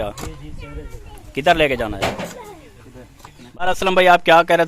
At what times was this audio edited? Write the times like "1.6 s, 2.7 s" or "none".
3.7 s